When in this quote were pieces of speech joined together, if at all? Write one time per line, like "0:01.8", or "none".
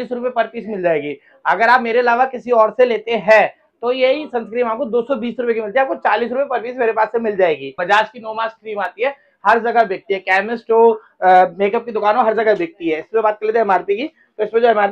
0:07.7